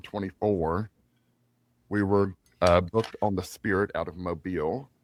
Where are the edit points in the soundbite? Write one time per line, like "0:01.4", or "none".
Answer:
none

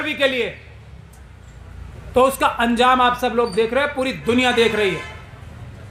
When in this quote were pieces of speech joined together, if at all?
none

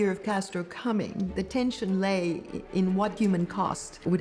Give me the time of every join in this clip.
0:03.1

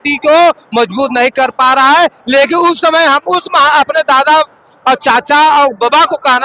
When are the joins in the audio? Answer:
none

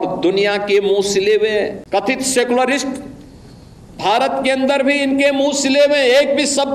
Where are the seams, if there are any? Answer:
0:01.8

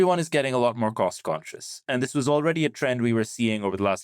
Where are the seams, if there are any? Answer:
none

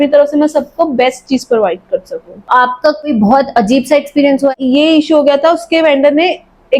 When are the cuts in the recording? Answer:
0:02.5
0:04.5

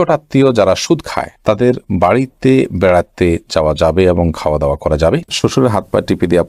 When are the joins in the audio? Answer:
0:05.3

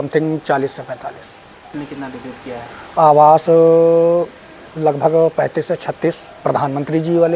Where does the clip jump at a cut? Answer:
0:01.7

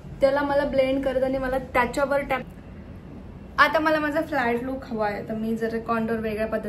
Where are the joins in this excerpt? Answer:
0:02.4

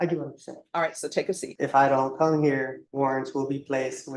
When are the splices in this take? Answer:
0:01.5
0:02.8

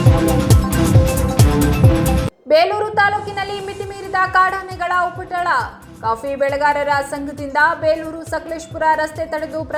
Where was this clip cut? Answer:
0:02.2

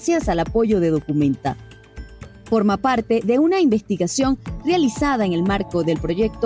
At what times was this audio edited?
0:02.0

